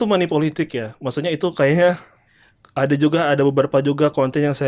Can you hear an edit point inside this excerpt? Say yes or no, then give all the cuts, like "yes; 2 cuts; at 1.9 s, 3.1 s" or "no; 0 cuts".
no; 0 cuts